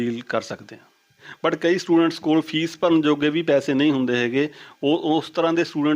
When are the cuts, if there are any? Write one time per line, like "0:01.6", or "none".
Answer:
0:01.3